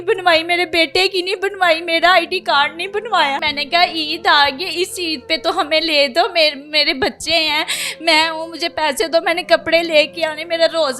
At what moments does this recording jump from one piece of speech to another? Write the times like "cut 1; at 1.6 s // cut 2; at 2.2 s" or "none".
cut 1; at 3.5 s